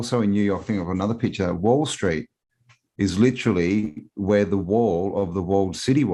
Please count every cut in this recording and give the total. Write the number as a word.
zero